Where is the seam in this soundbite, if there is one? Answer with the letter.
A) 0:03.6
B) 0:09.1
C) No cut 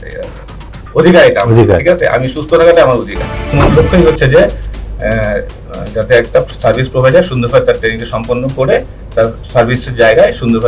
A